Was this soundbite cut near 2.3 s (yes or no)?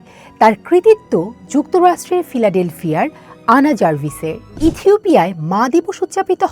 no